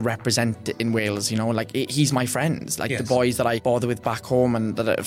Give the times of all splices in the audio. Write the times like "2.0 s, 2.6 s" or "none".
3.6 s